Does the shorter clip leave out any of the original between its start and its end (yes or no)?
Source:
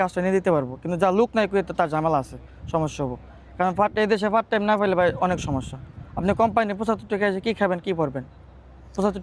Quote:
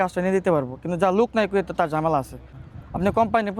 yes